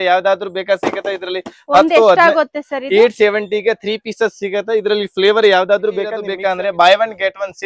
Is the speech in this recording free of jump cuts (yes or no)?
no